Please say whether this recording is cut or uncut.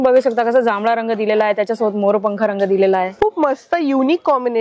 uncut